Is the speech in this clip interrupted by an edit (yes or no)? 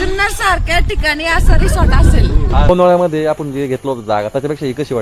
yes